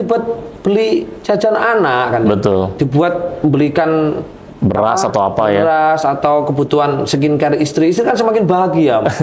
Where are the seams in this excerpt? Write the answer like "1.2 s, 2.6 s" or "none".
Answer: none